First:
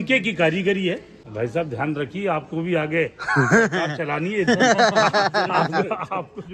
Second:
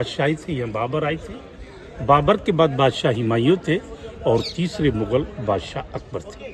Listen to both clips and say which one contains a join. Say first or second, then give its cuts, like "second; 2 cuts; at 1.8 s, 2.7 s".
first; 1 cut; at 1.2 s